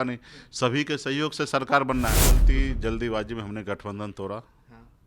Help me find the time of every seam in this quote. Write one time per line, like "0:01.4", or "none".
0:02.4